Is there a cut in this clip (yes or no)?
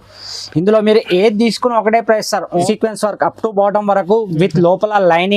yes